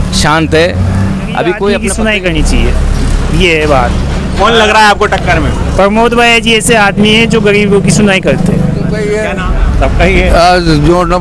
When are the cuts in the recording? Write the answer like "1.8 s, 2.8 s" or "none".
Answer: 1.8 s, 9.0 s